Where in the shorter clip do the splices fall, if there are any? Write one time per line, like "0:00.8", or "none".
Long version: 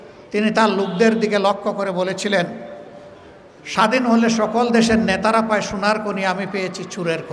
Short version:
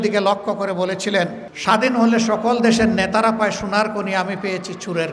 0:01.5